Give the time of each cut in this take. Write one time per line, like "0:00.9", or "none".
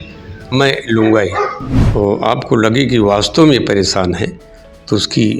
0:01.7